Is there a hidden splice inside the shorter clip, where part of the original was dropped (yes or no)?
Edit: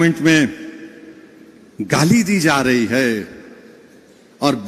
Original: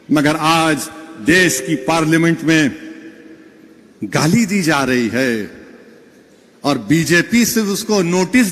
no